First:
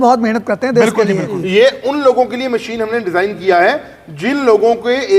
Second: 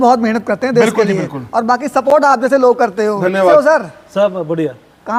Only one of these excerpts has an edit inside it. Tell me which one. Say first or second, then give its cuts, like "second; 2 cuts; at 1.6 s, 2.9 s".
first; 1 cut; at 1.4 s